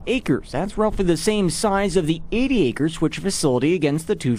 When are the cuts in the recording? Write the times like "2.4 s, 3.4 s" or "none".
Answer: none